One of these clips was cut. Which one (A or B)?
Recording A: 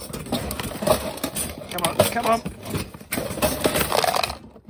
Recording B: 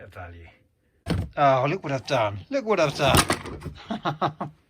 B